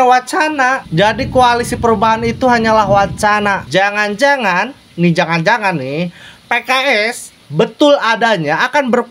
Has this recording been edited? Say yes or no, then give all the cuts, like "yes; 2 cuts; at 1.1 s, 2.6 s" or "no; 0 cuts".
no; 0 cuts